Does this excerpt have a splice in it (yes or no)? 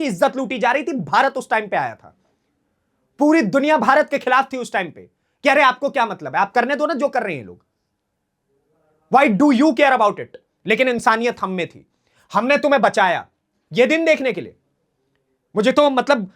no